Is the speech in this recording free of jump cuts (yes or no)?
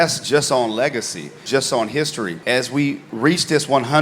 no